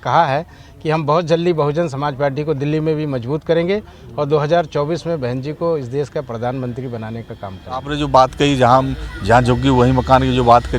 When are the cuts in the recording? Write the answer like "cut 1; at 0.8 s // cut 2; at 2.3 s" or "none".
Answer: cut 1; at 7.9 s